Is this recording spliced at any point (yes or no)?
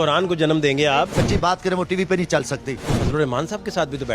yes